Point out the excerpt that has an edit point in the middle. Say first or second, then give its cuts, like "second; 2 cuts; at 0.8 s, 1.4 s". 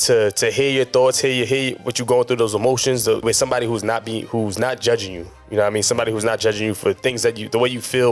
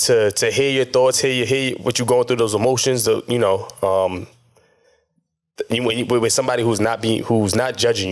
first; 1 cut; at 3.2 s